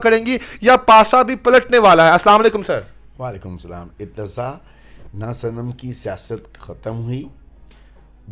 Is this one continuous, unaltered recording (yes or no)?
yes